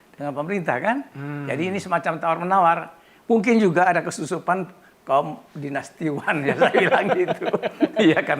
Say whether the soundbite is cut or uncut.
uncut